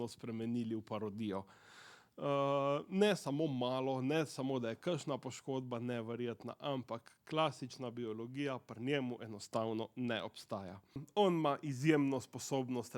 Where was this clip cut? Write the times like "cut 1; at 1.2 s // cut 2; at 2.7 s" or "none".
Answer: cut 1; at 11.0 s